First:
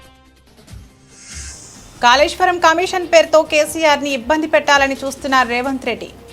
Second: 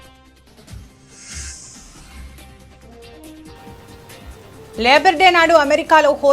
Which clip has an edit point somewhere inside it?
first; 1 cut; at 2.0 s

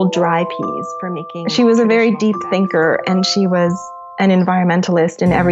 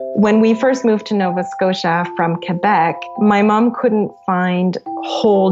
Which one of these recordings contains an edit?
first; 1 cut; at 1.0 s

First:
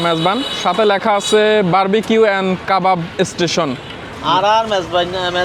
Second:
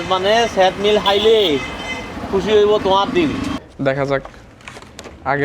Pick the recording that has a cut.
second; 1 cut; at 3.6 s

